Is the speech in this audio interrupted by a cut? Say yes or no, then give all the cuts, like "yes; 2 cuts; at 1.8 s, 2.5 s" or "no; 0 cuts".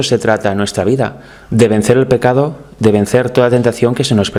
no; 0 cuts